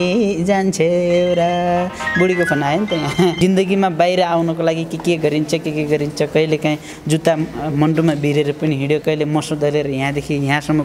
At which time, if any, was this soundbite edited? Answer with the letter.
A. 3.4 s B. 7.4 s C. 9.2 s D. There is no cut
A